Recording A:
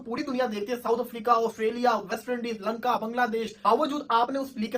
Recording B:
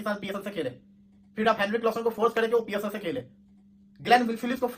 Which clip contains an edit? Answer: A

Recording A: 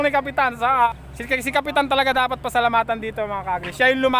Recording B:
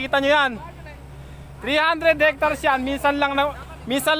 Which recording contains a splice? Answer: A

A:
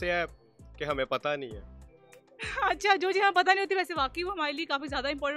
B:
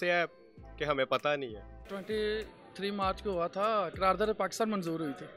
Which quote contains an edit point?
B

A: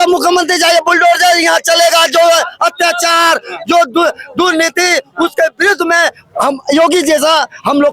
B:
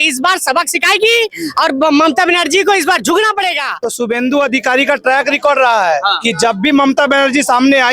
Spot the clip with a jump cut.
B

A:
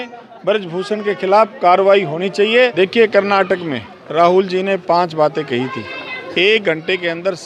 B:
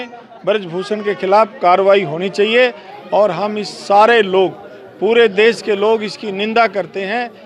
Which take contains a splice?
A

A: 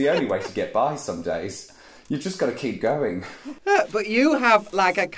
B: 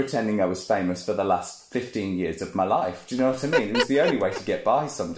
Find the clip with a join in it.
A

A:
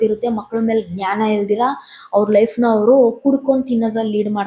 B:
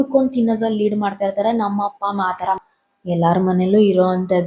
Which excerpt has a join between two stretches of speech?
B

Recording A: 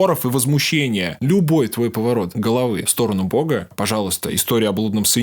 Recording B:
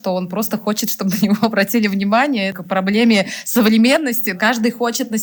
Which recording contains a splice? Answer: A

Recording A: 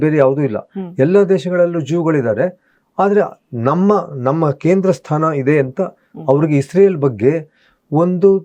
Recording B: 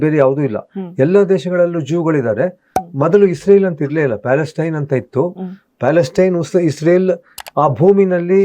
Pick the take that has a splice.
B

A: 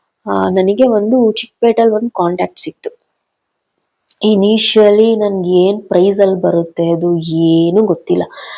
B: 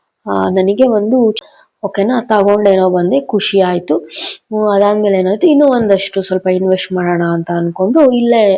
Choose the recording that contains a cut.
B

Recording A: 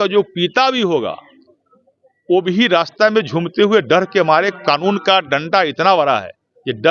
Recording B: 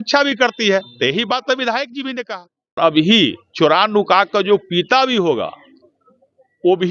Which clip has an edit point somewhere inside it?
B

